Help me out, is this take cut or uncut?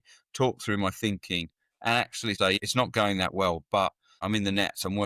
cut